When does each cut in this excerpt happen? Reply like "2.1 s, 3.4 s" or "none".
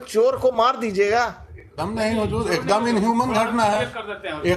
none